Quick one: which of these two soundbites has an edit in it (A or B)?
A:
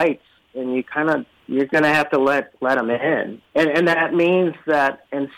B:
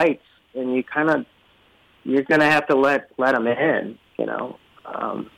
A